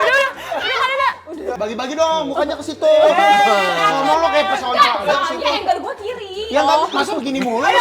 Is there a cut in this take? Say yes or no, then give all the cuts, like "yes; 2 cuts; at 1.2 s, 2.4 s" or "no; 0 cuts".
yes; 1 cut; at 1.5 s